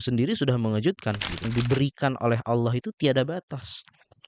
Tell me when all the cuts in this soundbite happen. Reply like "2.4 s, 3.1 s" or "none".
1.5 s